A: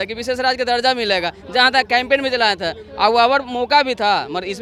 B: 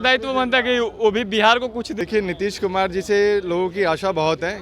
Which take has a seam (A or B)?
B